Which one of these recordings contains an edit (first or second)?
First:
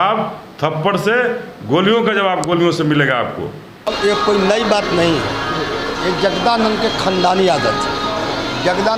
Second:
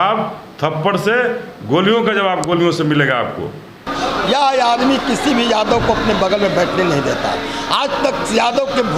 second